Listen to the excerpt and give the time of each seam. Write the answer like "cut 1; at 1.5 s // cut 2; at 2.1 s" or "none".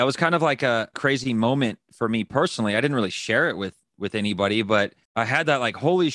cut 1; at 0.9 s // cut 2; at 5.0 s